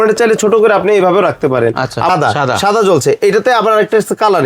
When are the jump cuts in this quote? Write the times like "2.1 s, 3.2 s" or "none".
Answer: 2.1 s